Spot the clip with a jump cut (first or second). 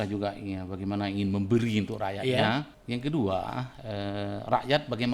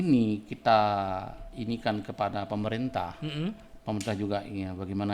first